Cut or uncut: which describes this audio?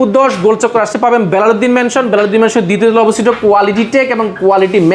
uncut